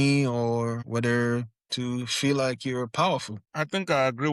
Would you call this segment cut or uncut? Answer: cut